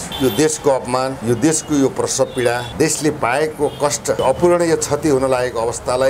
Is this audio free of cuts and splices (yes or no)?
yes